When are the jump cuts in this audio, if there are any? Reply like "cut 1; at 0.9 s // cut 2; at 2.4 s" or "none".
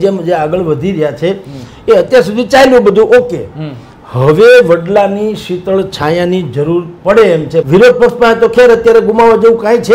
cut 1; at 7.7 s